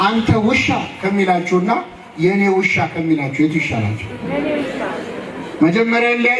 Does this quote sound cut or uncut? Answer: uncut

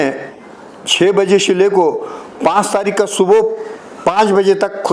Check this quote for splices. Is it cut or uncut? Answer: uncut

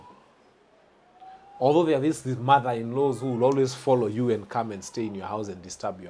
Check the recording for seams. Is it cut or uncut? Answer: uncut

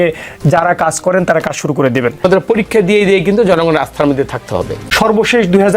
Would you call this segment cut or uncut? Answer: cut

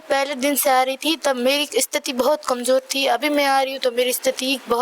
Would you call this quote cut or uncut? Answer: uncut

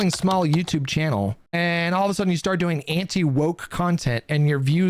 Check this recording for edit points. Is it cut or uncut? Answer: uncut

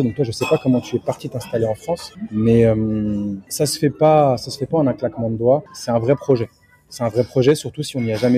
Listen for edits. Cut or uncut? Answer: cut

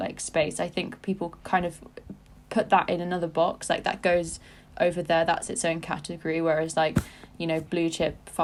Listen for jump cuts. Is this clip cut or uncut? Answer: uncut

